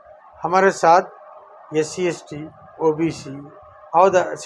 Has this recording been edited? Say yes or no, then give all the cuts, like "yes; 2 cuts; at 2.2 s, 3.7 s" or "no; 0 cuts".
no; 0 cuts